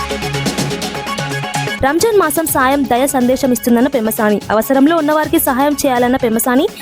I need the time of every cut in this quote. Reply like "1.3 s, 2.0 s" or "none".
1.8 s